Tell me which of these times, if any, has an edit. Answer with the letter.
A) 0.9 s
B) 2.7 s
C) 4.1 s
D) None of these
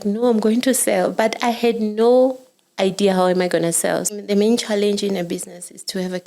C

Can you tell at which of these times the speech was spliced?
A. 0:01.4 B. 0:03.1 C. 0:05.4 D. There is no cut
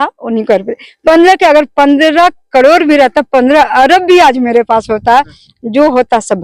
C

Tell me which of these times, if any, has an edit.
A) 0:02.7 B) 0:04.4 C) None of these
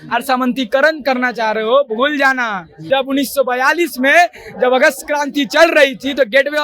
A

